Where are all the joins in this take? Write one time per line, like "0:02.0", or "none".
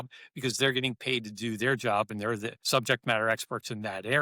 0:02.5